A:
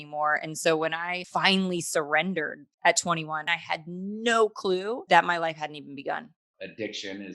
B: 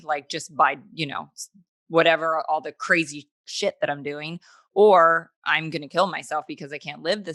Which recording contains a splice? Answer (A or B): A